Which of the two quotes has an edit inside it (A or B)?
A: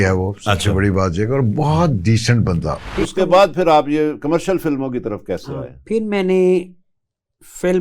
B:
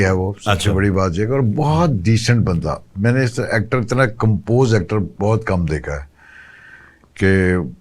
A